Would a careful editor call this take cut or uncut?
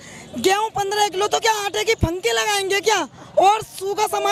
uncut